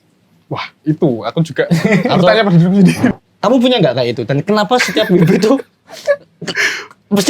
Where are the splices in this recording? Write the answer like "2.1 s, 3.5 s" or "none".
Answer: 3.1 s